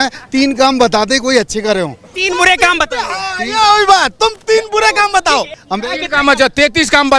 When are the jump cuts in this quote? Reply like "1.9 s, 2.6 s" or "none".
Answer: 5.6 s